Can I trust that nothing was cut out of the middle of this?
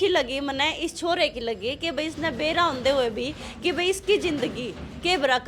yes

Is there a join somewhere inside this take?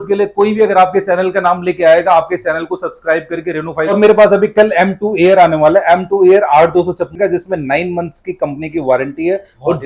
yes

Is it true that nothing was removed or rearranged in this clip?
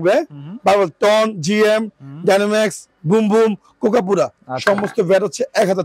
yes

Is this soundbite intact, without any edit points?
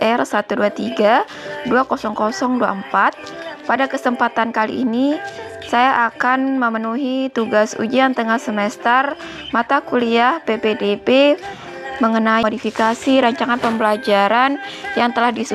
yes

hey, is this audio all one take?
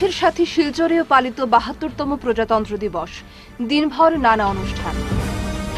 yes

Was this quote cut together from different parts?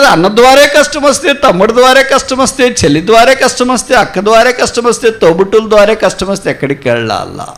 no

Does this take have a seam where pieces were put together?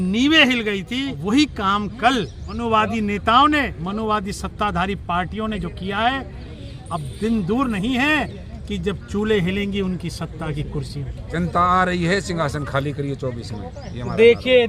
yes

